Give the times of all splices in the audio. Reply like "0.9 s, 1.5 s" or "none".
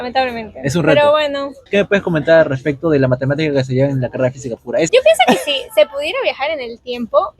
1.6 s, 4.9 s